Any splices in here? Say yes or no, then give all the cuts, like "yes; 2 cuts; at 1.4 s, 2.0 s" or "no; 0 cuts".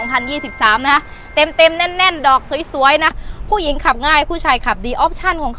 yes; 1 cut; at 3.2 s